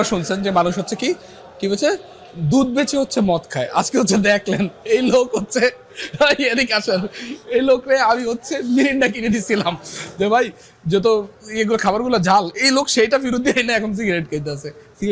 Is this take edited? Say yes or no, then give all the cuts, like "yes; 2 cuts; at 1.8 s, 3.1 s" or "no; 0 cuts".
no; 0 cuts